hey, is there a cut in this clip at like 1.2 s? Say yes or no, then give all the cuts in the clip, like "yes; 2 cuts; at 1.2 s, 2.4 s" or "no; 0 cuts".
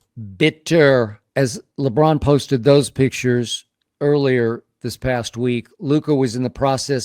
yes; 1 cut; at 1.2 s